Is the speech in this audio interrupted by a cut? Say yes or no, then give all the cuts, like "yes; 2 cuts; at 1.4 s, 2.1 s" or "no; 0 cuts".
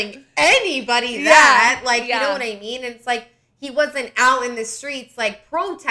no; 0 cuts